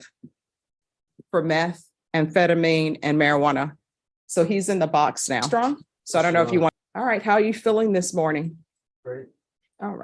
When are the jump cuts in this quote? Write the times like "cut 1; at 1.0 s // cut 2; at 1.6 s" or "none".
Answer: cut 1; at 6.7 s